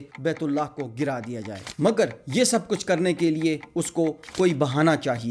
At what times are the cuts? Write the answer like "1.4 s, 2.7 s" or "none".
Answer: 1.6 s